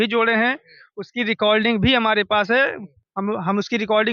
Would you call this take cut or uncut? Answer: uncut